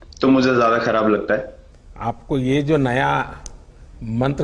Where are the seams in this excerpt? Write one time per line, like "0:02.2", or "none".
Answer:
0:01.8